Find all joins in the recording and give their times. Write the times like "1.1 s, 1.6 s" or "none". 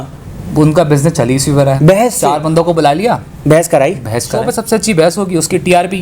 2.1 s, 4.5 s